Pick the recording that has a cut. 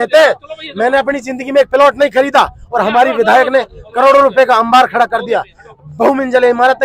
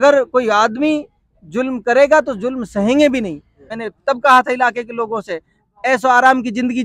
second; 1 cut; at 3.7 s

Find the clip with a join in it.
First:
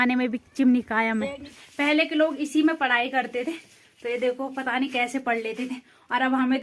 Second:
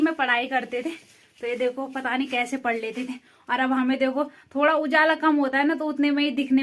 first; 1 cut; at 1.6 s

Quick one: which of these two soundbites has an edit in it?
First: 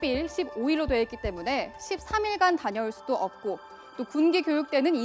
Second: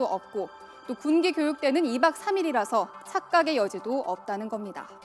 first; 1 cut; at 1.6 s

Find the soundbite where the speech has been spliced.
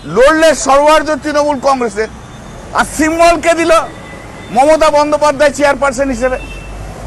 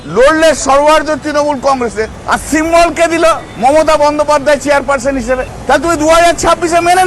second; 3 cuts; at 2.2 s, 3.5 s, 5.5 s

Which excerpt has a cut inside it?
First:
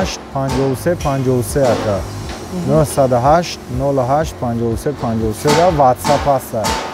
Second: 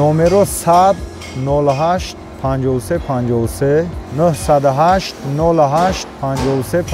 second; 1 cut; at 4.0 s

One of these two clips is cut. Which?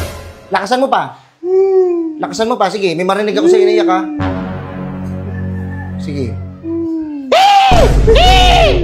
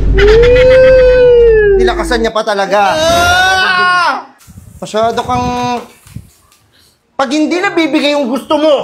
second; 1 cut; at 4.3 s

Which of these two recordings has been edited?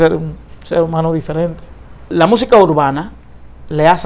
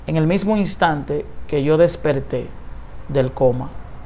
first; 1 cut; at 2.1 s

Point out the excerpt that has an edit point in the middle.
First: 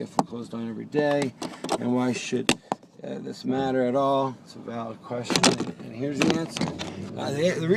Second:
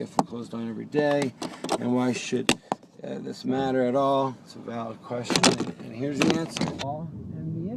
first; 1 cut; at 6.8 s

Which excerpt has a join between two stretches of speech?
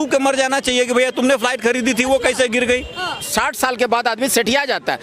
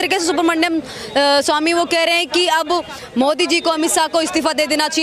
first; 1 cut; at 3.2 s

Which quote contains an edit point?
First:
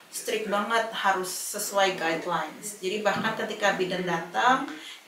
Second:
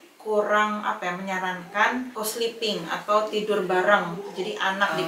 second; 1 cut; at 2.1 s

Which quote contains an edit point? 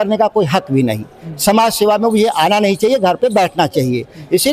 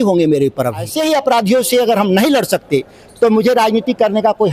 second; 1 cut; at 0.9 s

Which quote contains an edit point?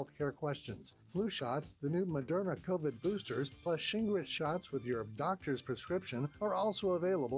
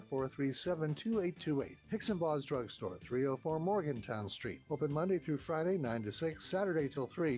second; 1 cut; at 5.4 s

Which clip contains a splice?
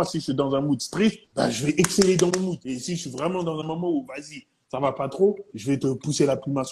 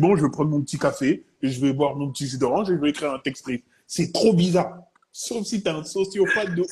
first; 3 cuts; at 1.2 s, 2.6 s, 5.5 s

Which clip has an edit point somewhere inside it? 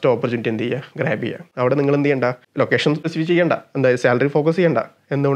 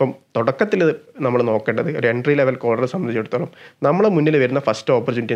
first; 2 cuts; at 1.5 s, 3.0 s

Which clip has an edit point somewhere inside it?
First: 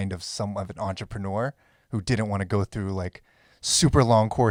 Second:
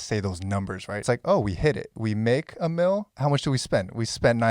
second; 3 cuts; at 1.0 s, 1.9 s, 3.1 s

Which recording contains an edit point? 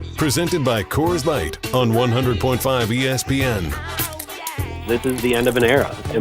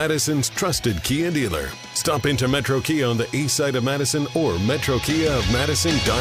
first; 1 cut; at 4.8 s

